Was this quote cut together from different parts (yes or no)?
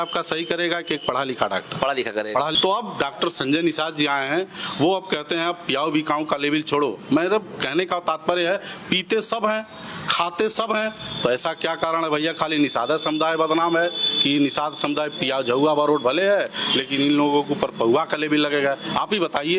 yes